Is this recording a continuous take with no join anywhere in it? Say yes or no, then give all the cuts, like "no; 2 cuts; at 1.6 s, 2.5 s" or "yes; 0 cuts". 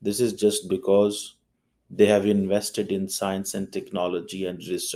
yes; 0 cuts